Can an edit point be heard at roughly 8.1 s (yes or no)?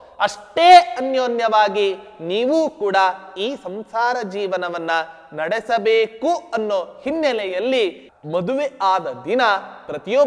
yes